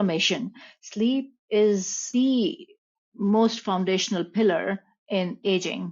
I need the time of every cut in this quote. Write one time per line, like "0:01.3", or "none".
0:02.0